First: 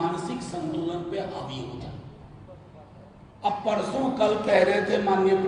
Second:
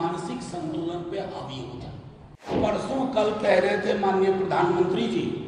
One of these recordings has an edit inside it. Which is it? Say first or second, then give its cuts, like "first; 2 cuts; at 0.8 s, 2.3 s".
second; 1 cut; at 2.6 s